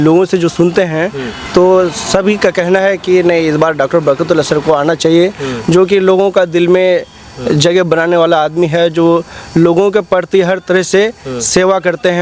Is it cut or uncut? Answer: uncut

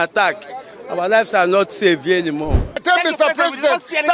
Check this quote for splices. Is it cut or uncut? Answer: cut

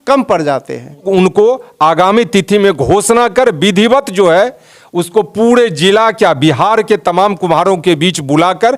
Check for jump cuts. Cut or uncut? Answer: cut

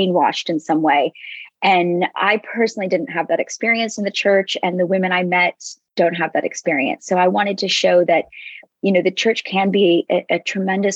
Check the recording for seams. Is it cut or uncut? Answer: uncut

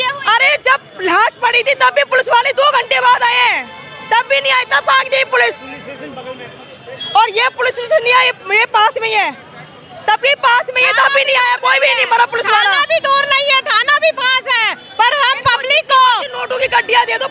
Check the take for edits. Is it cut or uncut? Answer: uncut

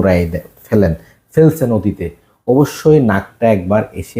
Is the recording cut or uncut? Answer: uncut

